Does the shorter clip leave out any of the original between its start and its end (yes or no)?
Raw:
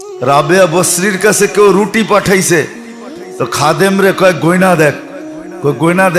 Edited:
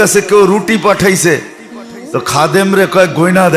no